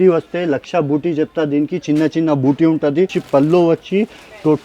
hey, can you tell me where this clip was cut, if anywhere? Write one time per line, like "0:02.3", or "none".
0:03.2